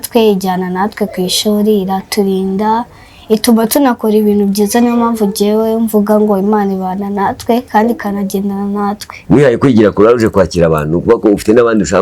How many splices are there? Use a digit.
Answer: 1